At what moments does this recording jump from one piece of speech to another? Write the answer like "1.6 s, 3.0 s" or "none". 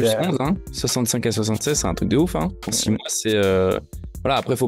none